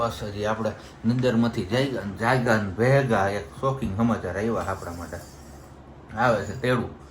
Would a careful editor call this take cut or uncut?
uncut